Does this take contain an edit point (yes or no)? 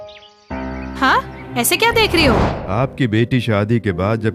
yes